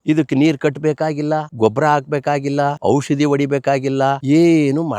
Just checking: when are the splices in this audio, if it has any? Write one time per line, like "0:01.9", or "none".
0:01.5
0:02.8
0:04.2